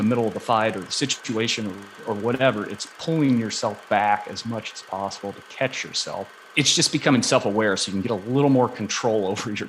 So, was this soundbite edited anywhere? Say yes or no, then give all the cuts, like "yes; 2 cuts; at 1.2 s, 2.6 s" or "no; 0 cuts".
yes; 1 cut; at 6.5 s